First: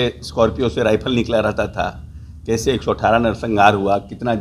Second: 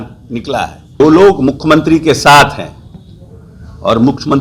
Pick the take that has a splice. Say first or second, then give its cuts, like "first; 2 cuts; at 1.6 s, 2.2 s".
second; 1 cut; at 1.0 s